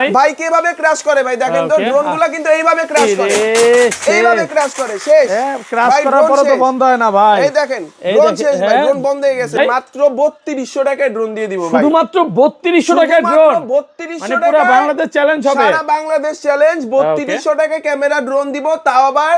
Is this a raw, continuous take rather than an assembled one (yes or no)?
no